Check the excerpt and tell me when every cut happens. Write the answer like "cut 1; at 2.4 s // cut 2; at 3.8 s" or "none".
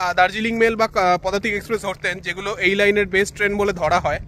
none